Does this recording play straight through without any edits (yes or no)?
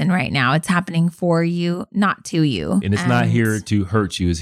no